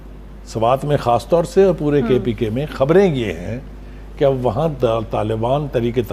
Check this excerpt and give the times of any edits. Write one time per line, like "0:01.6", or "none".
none